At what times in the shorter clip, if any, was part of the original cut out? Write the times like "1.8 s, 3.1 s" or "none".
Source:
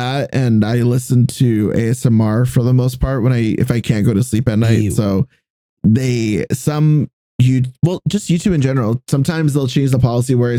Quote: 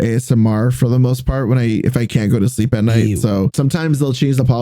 3.5 s

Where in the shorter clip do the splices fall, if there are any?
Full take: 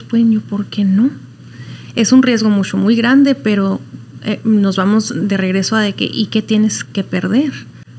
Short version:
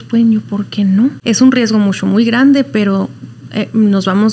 1.2 s

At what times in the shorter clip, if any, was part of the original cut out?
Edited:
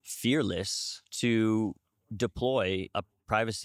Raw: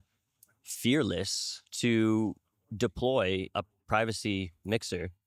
none

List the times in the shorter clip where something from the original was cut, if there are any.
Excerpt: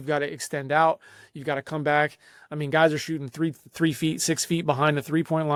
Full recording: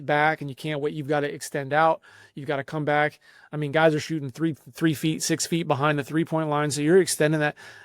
none

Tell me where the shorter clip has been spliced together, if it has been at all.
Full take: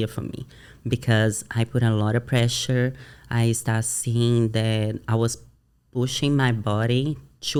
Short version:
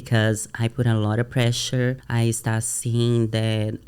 2.0 s

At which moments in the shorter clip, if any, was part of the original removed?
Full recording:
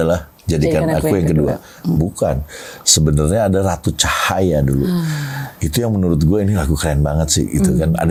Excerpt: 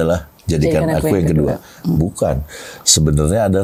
none

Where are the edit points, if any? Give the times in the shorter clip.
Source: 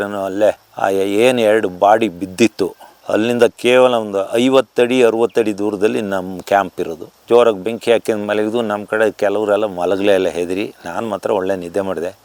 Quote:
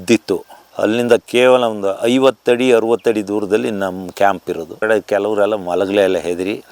4.8 s

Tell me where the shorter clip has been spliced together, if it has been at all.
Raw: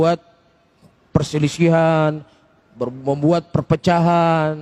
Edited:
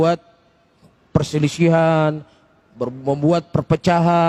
none

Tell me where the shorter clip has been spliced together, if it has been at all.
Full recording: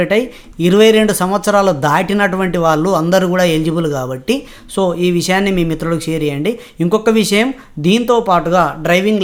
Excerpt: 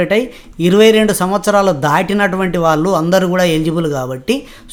none

